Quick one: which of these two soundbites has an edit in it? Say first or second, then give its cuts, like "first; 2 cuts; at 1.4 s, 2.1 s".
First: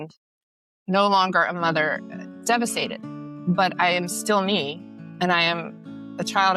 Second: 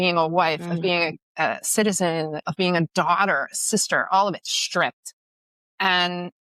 second; 1 cut; at 2.4 s